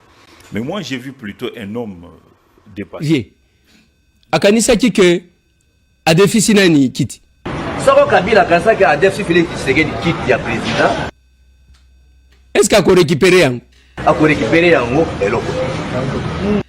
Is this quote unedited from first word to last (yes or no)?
no